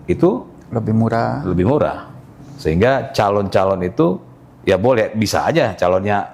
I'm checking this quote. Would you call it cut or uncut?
uncut